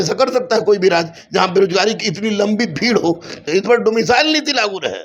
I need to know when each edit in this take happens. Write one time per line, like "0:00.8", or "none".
0:03.4